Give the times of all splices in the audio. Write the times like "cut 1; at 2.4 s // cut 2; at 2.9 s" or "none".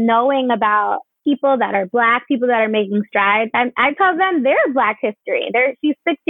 cut 1; at 1.1 s